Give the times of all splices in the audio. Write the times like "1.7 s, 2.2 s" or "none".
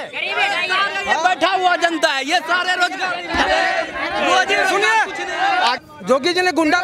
5.8 s